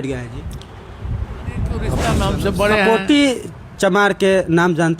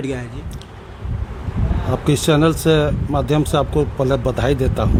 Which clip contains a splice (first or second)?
first